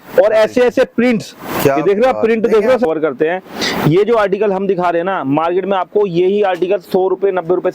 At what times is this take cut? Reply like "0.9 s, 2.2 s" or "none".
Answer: 2.9 s